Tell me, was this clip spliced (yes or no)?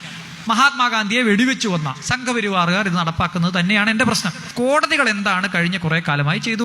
no